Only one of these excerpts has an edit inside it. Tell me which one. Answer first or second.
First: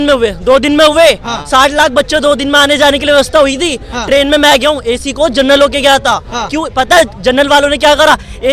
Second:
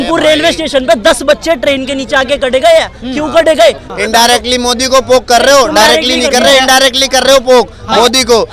second